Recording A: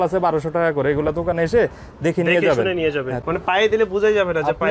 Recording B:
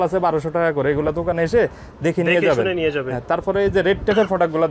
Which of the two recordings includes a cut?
A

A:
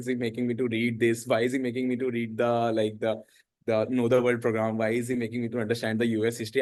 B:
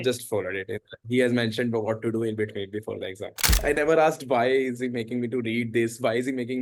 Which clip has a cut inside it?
B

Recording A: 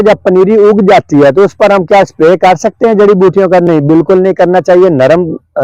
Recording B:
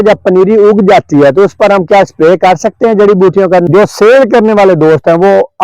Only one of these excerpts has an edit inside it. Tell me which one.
B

